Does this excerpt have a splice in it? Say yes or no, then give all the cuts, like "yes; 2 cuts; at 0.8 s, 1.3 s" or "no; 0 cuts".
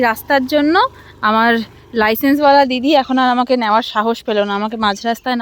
no; 0 cuts